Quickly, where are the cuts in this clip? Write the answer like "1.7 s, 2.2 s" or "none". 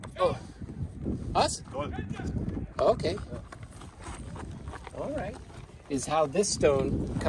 none